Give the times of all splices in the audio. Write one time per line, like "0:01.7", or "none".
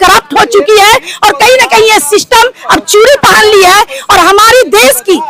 none